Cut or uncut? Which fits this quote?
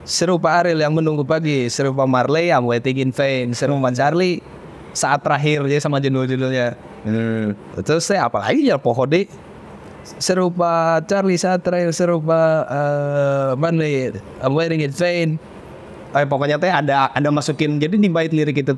uncut